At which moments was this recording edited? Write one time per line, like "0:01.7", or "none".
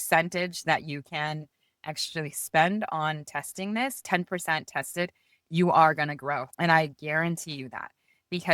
0:04.0
0:06.5